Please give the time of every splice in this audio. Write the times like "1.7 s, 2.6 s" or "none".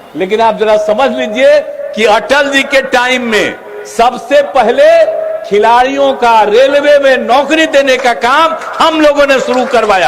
none